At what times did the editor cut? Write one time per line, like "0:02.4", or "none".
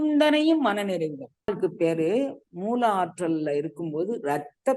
0:01.5